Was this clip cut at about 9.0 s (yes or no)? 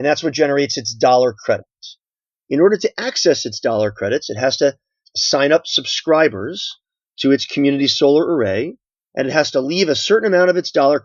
no